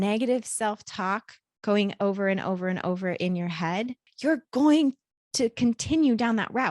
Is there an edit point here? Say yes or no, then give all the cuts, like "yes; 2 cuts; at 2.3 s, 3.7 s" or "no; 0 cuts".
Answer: yes; 1 cut; at 4.0 s